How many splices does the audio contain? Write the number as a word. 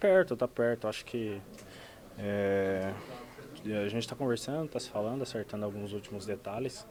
zero